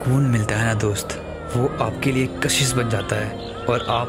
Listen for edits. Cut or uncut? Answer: uncut